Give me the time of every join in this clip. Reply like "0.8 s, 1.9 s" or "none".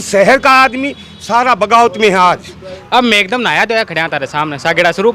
2.5 s